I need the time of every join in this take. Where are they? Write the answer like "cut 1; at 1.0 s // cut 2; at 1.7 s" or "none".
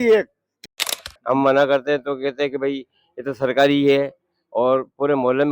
cut 1; at 0.9 s